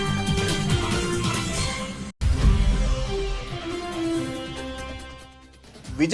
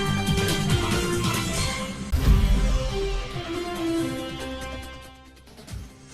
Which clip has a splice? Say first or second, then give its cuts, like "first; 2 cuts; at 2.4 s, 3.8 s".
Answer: second; 1 cut; at 2.0 s